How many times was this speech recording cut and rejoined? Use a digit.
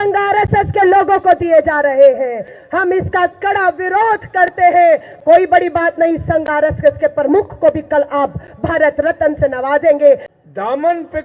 2